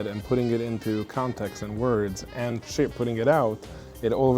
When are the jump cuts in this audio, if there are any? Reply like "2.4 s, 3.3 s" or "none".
none